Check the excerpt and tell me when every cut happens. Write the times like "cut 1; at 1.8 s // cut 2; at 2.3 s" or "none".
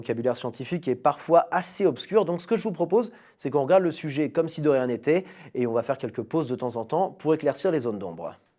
cut 1; at 5.5 s